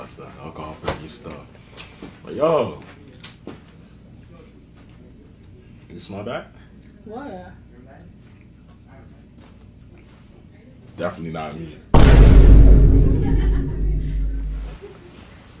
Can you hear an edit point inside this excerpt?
no; 0 cuts

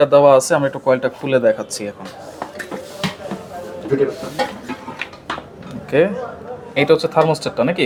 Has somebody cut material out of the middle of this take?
no; 0 cuts

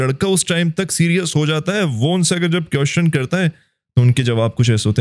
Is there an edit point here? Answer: no; 0 cuts

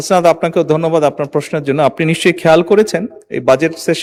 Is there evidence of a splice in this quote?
no; 0 cuts

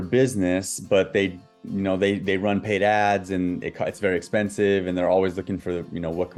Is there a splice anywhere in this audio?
no; 0 cuts

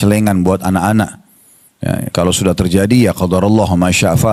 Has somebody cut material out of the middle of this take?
no; 0 cuts

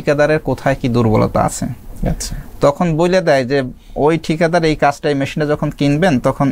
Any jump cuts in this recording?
no; 0 cuts

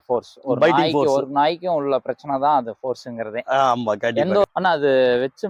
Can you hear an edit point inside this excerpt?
yes; 1 cut; at 4.4 s

